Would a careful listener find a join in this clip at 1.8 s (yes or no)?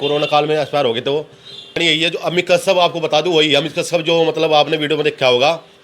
yes